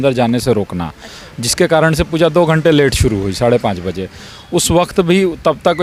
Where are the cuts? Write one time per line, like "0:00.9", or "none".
none